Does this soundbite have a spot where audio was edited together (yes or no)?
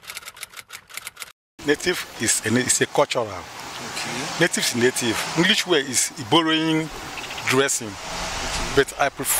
no